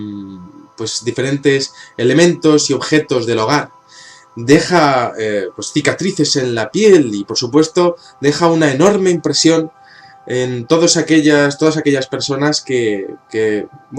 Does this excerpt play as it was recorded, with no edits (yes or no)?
no